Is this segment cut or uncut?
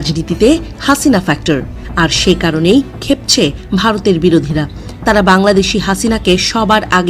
cut